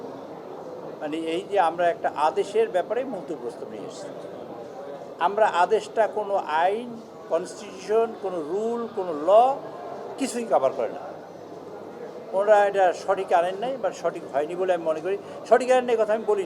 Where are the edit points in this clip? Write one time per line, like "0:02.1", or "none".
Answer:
none